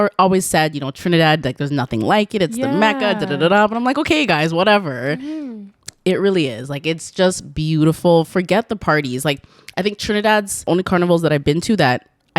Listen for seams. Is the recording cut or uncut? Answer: cut